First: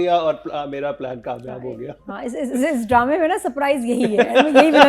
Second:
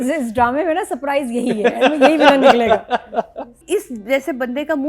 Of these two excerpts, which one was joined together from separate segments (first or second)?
second